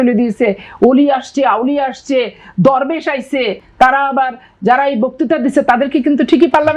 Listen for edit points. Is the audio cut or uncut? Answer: cut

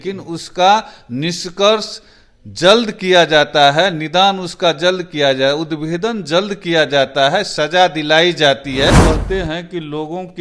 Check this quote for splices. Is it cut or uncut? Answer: cut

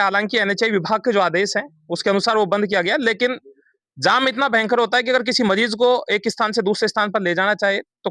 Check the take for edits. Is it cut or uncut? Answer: uncut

